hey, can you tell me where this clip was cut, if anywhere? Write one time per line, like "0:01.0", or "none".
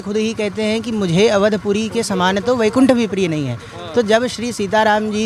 none